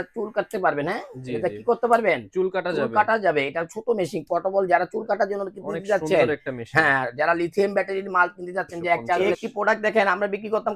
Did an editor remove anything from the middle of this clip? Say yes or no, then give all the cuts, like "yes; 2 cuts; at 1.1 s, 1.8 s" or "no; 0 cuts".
yes; 1 cut; at 9.2 s